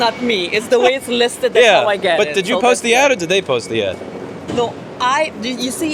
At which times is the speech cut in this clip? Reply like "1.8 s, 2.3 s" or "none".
none